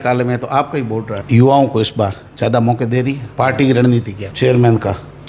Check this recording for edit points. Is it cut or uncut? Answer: cut